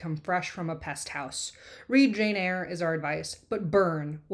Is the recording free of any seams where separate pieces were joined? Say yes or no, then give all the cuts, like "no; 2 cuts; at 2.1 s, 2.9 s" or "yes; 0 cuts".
yes; 0 cuts